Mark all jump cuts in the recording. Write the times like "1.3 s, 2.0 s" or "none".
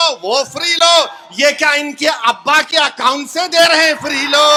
none